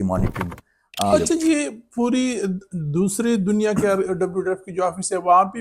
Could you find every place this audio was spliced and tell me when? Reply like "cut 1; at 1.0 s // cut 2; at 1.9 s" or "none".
cut 1; at 1.1 s